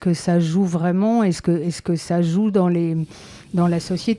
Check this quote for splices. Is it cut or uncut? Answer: uncut